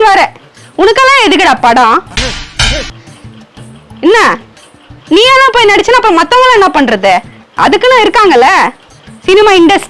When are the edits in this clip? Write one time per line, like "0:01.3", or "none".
none